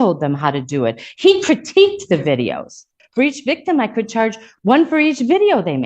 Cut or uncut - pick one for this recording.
cut